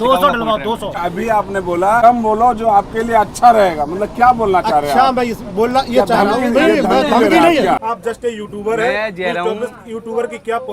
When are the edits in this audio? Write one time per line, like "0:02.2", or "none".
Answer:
0:00.9
0:02.0
0:07.9